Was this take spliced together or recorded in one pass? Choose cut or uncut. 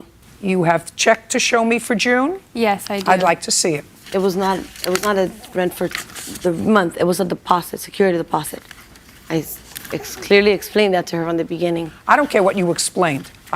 cut